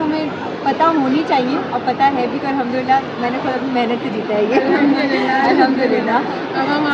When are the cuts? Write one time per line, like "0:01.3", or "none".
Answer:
none

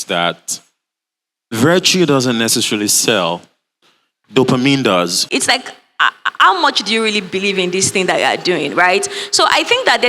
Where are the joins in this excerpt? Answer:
0:05.2

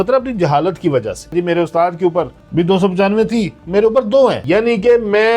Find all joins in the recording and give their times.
0:01.3
0:02.4
0:04.4

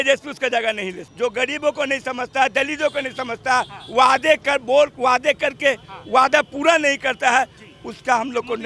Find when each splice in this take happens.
0:01.0

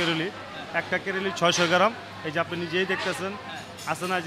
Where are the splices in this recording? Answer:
none

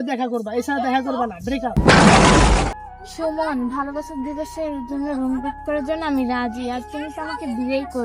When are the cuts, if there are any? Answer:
0:02.8

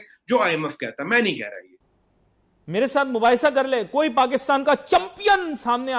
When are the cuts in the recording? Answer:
0:01.9

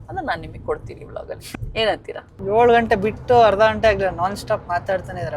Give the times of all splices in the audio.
0:01.4
0:02.3

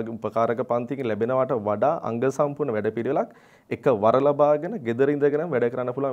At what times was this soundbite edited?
none

